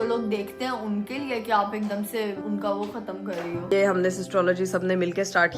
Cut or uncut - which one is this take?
cut